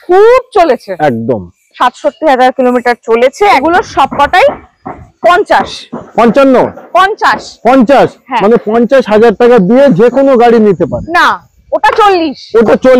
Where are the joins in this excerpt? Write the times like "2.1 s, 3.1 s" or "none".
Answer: 3.6 s